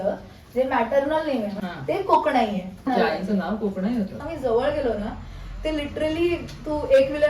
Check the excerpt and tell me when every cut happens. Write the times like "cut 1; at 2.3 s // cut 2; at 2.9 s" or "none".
cut 1; at 1.6 s // cut 2; at 2.9 s // cut 3; at 4.2 s